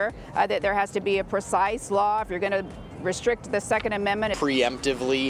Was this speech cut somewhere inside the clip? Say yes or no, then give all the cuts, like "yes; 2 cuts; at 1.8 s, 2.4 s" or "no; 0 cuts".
no; 0 cuts